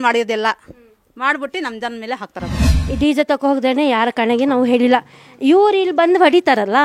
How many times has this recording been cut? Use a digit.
1